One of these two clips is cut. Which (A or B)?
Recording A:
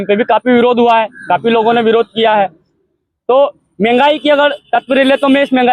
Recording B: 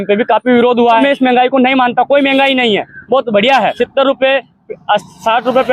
B